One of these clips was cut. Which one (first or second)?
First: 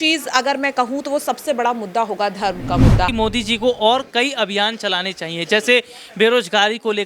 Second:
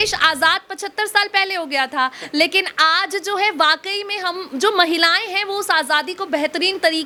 first